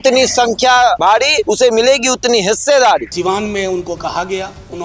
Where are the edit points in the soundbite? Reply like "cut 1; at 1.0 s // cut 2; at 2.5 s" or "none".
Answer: cut 1; at 1.2 s // cut 2; at 3.1 s